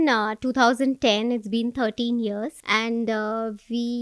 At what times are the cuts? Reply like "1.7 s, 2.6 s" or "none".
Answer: 2.6 s